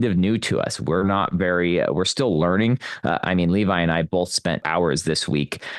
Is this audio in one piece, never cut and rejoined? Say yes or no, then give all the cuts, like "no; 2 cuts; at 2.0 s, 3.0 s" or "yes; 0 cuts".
no; 1 cut; at 4.7 s